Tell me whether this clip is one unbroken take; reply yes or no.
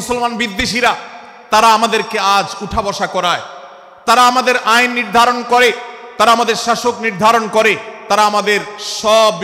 yes